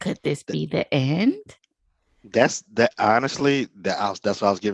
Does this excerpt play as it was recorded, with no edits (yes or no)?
yes